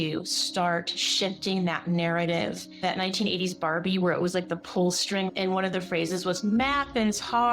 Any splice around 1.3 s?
no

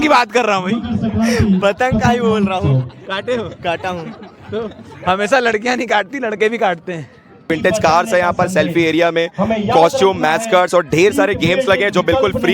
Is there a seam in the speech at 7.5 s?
yes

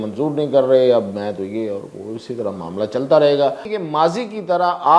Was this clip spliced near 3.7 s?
yes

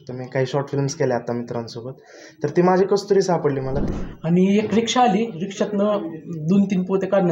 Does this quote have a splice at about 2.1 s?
no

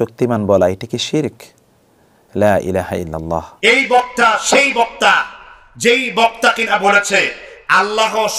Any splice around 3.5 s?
yes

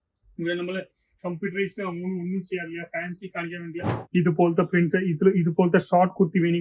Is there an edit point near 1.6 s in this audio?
no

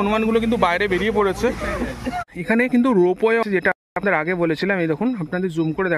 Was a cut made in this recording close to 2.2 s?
yes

